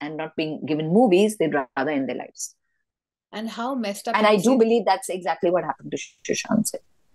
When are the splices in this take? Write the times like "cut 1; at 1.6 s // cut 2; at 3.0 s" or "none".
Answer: none